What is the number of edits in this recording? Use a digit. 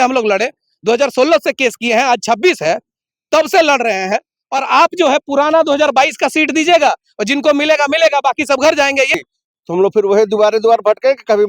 1